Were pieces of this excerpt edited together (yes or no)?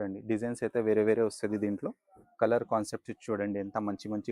no